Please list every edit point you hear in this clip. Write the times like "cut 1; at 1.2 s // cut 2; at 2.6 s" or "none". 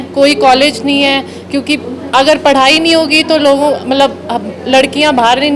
none